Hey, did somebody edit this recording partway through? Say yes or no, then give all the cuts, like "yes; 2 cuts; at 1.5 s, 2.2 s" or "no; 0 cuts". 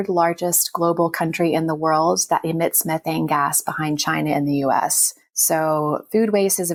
no; 0 cuts